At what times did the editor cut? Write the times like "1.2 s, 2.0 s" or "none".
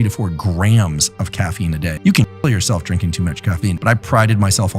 2.0 s, 3.8 s